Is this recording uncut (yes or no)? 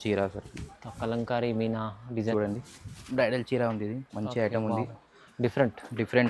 no